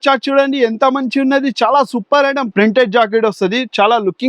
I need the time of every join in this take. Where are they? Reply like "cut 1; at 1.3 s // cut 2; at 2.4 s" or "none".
cut 1; at 2.5 s